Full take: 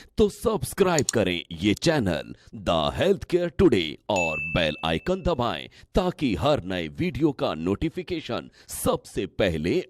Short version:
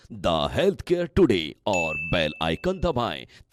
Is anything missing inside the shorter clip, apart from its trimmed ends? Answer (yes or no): no